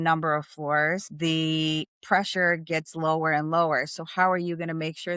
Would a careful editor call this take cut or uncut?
cut